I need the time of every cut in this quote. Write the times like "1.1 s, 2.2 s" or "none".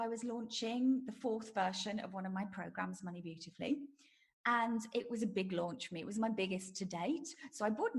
none